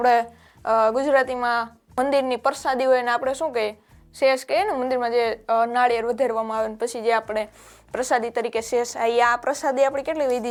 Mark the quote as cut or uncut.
uncut